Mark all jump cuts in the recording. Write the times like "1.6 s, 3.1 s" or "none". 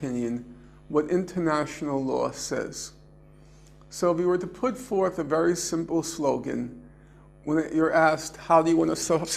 none

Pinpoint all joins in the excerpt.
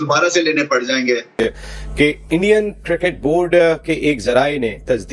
1.3 s

